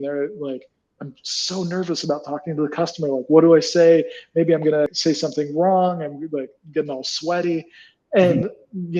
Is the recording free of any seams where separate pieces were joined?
no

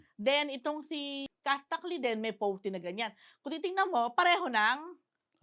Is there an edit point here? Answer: yes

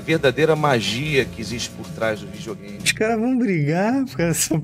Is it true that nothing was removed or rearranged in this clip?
no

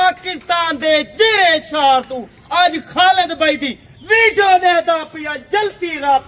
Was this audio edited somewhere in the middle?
no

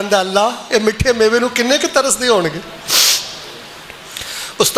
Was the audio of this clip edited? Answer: no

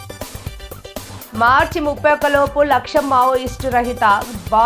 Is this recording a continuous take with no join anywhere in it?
yes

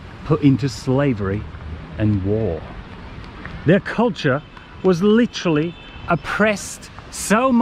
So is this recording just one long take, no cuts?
yes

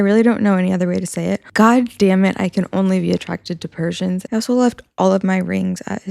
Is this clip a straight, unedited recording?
no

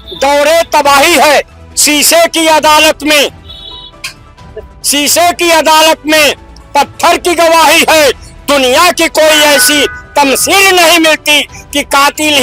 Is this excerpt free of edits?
yes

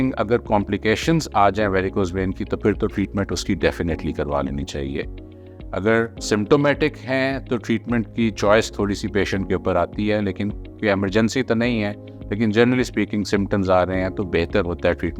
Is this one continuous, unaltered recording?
yes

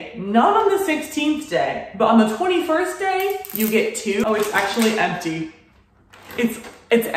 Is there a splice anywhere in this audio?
yes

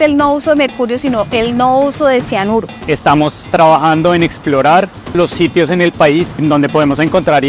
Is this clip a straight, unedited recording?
no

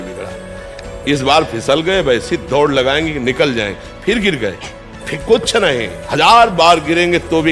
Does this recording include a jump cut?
yes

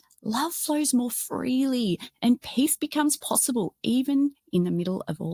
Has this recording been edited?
no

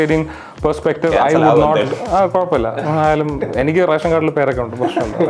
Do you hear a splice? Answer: no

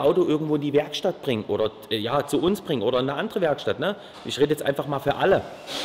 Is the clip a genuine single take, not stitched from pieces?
yes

